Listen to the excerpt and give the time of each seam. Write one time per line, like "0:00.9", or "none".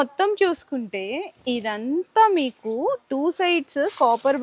none